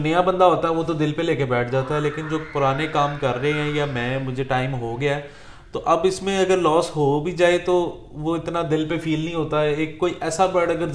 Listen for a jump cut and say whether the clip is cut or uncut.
uncut